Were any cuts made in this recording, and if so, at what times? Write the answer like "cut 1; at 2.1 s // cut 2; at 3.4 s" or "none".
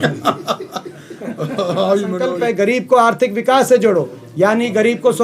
cut 1; at 2.3 s